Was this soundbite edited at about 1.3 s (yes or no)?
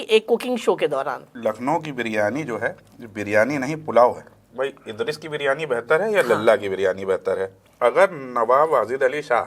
yes